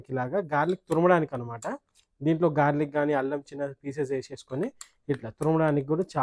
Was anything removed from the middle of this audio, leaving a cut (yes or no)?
no